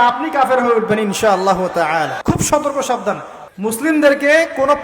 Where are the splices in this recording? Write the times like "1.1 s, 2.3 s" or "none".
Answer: 2.2 s, 3.3 s